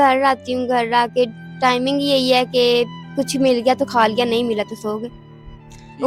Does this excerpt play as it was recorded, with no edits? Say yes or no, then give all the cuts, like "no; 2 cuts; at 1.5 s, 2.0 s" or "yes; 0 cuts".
yes; 0 cuts